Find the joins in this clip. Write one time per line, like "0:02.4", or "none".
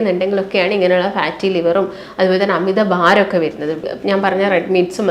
0:03.8